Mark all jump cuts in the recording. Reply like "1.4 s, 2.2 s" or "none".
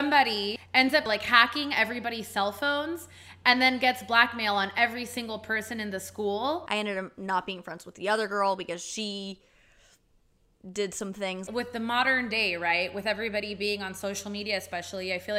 0.9 s, 6.6 s, 11.4 s